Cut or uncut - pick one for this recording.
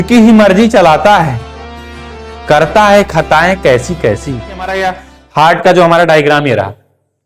cut